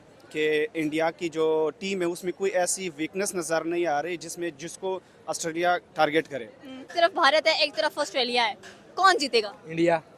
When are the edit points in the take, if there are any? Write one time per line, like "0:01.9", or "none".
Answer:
0:06.9